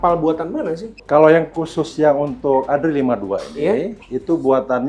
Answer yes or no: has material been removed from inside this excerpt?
yes